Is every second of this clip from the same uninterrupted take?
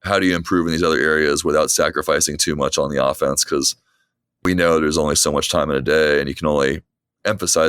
no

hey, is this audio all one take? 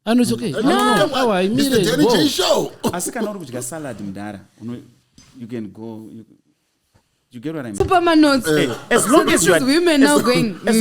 no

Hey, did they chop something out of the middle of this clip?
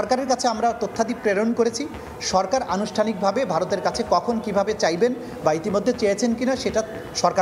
no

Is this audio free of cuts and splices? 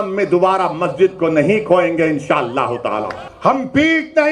no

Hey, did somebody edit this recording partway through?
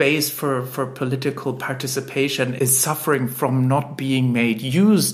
yes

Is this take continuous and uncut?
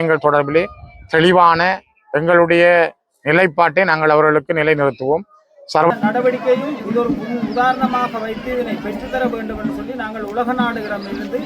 no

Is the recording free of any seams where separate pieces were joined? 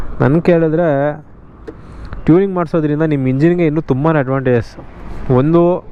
yes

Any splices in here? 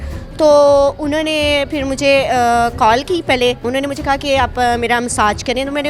yes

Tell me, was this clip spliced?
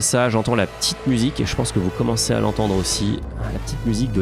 no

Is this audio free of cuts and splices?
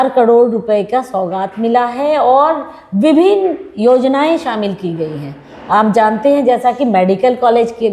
yes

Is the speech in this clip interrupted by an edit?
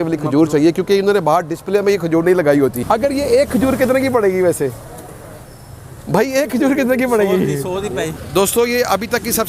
yes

